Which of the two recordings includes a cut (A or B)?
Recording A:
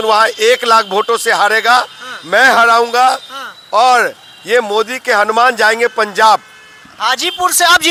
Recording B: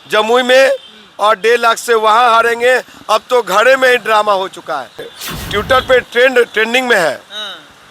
B